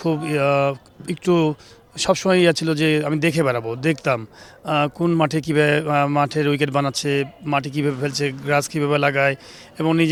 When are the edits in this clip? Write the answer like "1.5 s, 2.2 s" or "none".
none